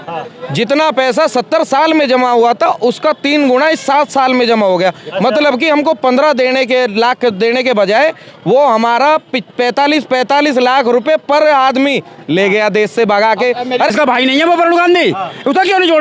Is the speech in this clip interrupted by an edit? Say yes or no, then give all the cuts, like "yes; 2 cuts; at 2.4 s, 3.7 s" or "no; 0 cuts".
yes; 1 cut; at 13.9 s